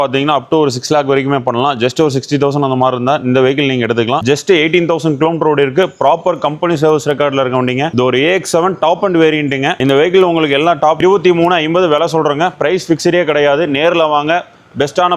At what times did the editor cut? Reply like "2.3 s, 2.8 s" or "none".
4.2 s, 11.0 s